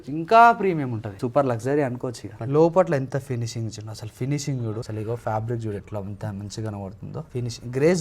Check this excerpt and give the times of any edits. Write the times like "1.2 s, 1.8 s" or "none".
1.2 s, 2.3 s, 4.9 s, 7.3 s